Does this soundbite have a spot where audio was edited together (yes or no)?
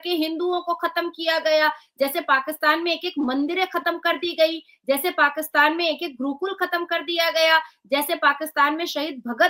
no